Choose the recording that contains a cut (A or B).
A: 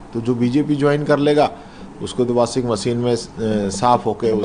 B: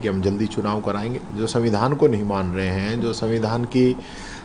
B